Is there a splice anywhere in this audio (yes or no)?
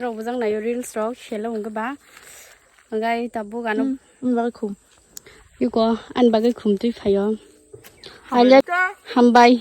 yes